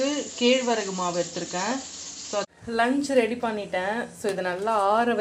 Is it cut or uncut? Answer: cut